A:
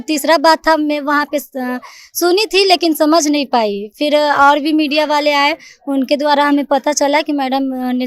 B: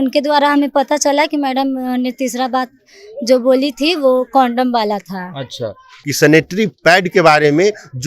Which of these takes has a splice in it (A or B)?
B